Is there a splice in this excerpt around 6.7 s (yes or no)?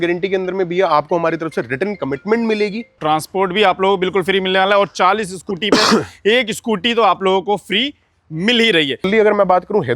no